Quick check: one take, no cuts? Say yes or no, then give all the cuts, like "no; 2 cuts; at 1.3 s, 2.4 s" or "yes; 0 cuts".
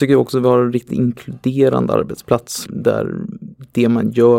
no; 1 cut; at 2.6 s